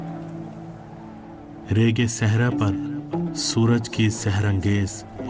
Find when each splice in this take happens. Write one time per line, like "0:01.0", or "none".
0:04.3

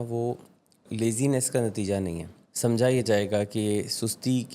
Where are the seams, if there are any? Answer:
0:02.3

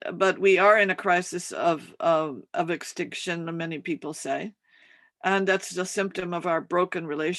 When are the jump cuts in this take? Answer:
none

